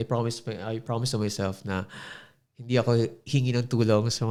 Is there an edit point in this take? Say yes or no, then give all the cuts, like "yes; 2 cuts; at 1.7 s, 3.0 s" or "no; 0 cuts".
no; 0 cuts